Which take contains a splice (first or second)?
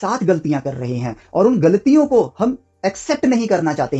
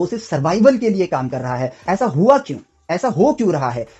second